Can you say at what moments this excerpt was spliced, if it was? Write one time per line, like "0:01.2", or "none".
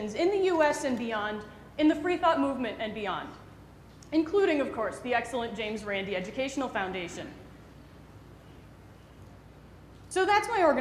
0:01.7

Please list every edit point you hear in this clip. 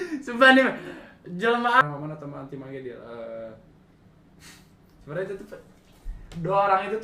0:01.8

